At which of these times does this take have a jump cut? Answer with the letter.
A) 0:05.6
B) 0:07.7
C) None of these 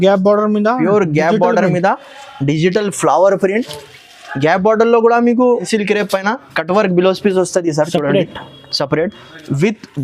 A